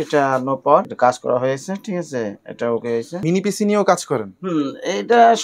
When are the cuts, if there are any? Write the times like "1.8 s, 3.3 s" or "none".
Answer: none